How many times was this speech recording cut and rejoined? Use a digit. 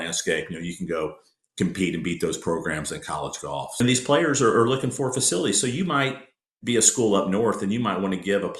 1